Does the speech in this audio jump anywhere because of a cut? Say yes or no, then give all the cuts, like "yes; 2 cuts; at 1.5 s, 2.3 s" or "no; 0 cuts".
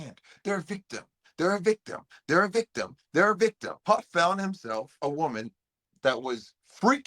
yes; 2 cuts; at 3.7 s, 4.9 s